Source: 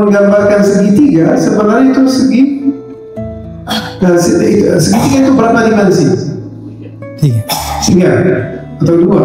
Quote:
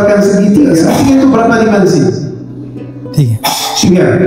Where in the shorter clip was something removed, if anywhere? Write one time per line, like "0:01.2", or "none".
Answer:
0:00.9